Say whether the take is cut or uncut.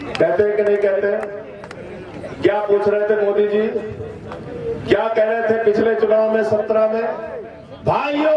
uncut